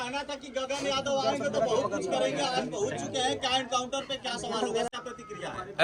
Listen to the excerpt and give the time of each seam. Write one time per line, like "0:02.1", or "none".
0:04.9